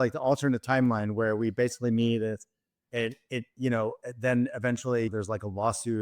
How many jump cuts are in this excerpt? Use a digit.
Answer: 1